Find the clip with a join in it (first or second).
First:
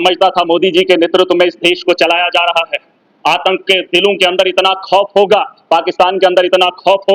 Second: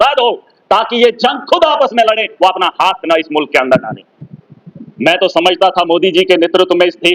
second